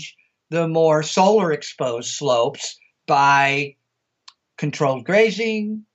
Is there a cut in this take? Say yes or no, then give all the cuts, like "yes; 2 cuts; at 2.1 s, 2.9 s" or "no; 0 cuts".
no; 0 cuts